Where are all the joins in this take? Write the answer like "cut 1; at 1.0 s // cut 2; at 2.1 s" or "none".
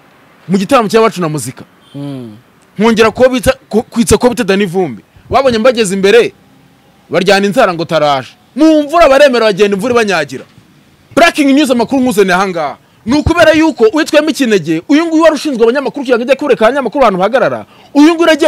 cut 1; at 11.0 s